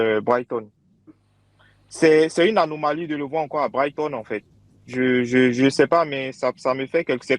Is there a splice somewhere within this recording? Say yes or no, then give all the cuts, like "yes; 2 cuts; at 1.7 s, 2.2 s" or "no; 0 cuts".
yes; 1 cut; at 1.6 s